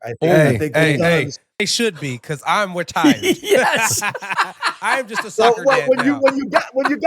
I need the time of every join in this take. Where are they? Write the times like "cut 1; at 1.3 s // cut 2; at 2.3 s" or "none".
cut 1; at 1.7 s